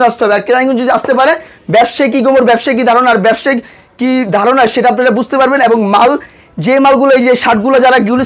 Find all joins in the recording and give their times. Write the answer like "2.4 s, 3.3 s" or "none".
none